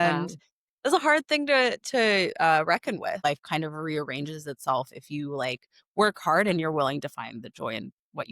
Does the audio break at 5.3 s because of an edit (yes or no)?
no